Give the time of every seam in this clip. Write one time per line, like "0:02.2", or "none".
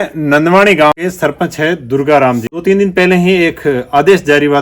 0:00.9
0:02.5